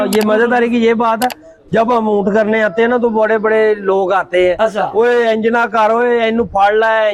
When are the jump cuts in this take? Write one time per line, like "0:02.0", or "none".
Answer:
none